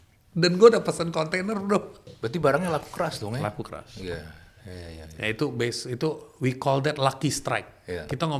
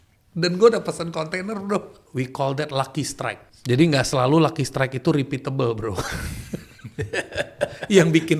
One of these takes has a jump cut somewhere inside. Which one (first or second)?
second